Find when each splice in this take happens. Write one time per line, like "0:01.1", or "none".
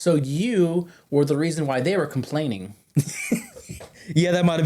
none

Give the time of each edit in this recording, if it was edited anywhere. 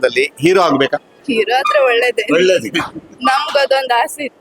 0:01.1

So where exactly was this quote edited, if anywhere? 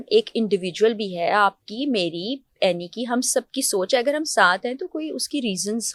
none

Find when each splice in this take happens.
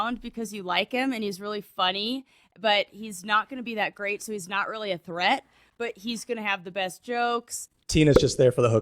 0:07.7

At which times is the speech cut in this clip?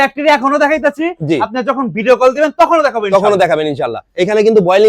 none

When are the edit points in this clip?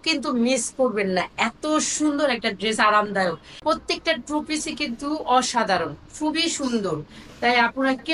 0:03.6

